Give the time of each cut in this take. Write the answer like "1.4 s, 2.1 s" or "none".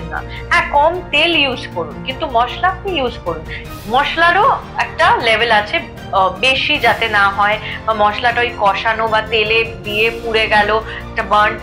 none